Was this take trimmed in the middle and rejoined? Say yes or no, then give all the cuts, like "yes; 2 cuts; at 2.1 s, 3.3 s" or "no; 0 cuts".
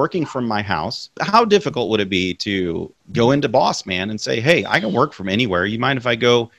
yes; 2 cuts; at 1.2 s, 3.0 s